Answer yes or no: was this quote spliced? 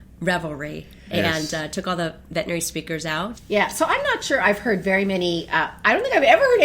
yes